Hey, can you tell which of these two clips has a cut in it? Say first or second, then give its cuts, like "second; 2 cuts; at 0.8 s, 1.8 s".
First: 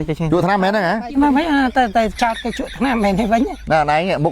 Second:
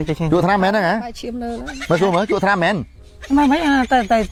first; 1 cut; at 1.0 s